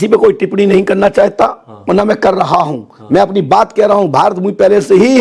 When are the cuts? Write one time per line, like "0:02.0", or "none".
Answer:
none